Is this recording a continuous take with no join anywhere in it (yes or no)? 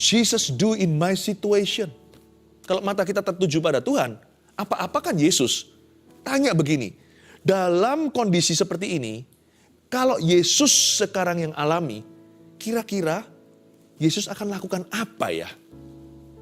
no